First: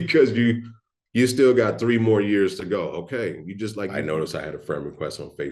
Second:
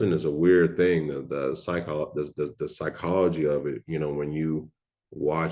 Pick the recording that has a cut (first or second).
first